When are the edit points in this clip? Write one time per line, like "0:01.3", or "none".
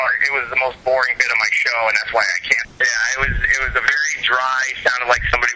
0:02.7